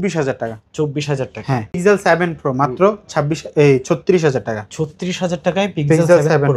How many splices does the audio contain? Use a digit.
1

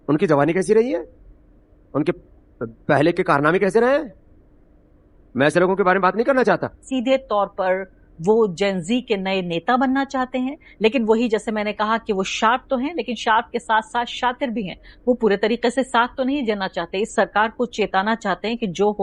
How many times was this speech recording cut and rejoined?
1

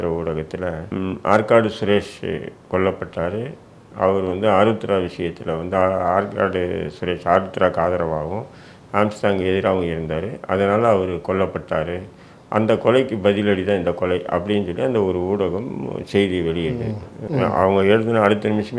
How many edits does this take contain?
2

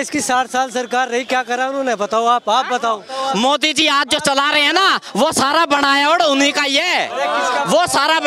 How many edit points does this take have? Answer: 1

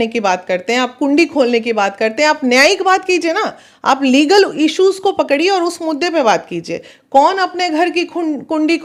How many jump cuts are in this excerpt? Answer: 0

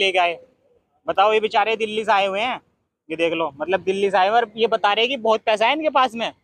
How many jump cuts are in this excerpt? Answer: 0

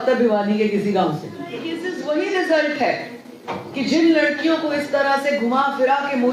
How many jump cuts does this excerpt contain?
1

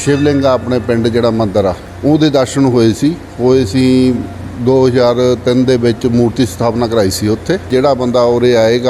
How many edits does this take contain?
2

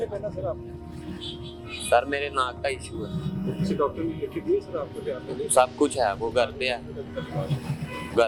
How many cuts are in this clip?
0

